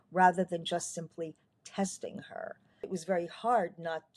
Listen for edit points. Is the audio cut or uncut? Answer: cut